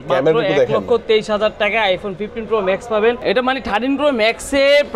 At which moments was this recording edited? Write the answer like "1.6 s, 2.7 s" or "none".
3.2 s